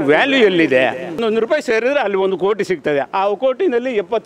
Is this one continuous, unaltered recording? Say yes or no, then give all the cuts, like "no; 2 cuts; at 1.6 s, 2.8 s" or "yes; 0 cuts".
no; 1 cut; at 1.2 s